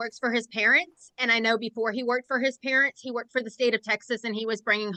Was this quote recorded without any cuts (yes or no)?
yes